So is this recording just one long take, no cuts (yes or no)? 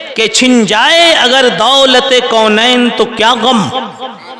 yes